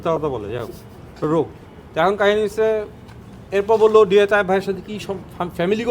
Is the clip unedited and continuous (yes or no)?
yes